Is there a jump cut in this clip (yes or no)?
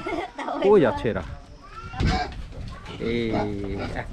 yes